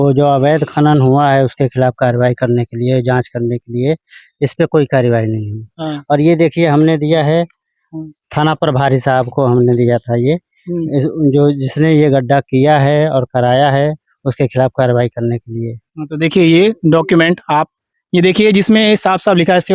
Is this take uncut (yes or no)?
yes